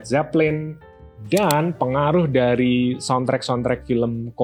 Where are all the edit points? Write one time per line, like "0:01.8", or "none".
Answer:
none